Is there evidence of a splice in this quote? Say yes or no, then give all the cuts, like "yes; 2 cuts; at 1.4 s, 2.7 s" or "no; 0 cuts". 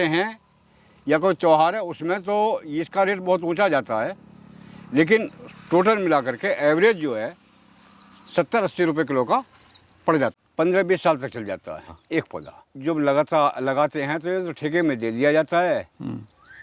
yes; 2 cuts; at 10.4 s, 12.4 s